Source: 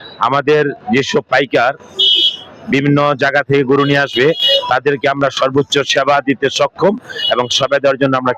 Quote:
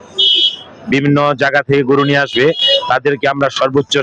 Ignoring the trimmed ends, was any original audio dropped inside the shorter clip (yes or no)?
no